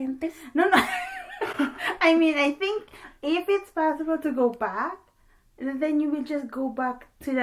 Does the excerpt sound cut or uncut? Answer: uncut